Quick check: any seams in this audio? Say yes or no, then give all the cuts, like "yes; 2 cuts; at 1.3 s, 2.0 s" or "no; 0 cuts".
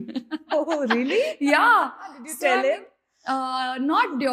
no; 0 cuts